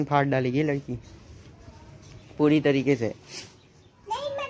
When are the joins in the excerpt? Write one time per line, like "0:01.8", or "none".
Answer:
none